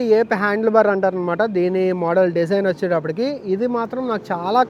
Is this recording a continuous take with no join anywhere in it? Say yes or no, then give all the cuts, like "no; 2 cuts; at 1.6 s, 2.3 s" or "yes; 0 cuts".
yes; 0 cuts